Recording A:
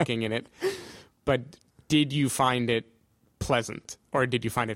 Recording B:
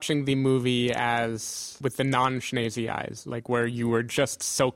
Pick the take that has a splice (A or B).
B